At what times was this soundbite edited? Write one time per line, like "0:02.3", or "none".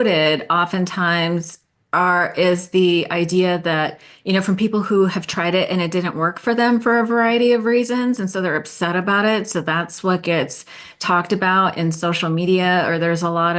none